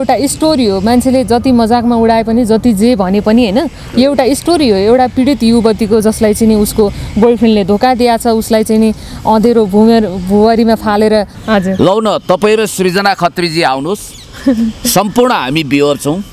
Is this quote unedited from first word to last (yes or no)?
no